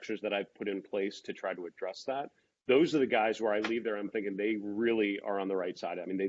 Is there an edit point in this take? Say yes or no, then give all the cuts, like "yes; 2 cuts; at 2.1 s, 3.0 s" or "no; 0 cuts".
no; 0 cuts